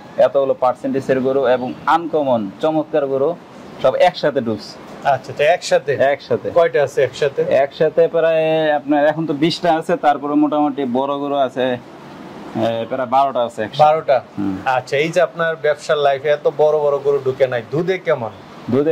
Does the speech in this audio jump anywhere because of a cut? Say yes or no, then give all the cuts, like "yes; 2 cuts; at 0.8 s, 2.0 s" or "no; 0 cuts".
no; 0 cuts